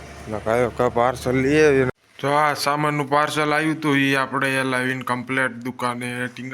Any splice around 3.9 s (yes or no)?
no